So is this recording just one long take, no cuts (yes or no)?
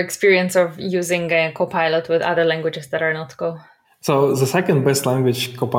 yes